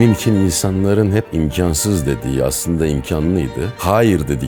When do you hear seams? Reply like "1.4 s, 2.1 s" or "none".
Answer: none